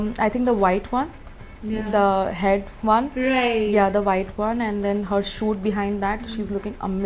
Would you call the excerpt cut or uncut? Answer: uncut